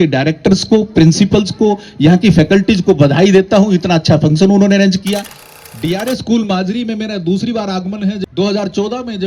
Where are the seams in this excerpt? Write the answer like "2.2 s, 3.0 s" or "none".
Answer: 5.3 s, 8.2 s